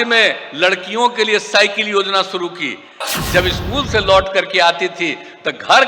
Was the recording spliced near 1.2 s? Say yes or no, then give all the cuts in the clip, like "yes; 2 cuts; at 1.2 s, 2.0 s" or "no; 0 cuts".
no; 1 cut; at 3.1 s